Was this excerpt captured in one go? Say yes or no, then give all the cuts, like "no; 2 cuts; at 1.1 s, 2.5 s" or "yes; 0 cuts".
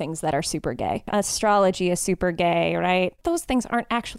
no; 2 cuts; at 1.0 s, 3.2 s